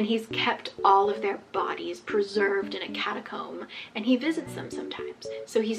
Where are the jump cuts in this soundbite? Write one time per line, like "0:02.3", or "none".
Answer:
none